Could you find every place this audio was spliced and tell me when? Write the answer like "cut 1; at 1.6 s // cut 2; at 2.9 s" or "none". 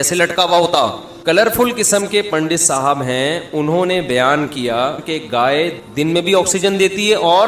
cut 1; at 1.1 s // cut 2; at 5.0 s // cut 3; at 5.8 s